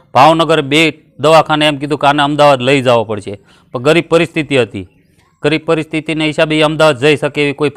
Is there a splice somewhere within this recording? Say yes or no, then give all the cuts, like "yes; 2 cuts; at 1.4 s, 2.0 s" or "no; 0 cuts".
no; 0 cuts